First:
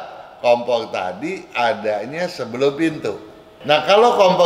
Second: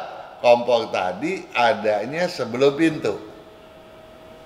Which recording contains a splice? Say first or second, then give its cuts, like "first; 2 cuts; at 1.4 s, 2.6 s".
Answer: first; 1 cut; at 3.5 s